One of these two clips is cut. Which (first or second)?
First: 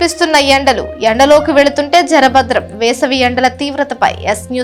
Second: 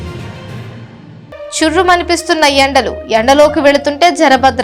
second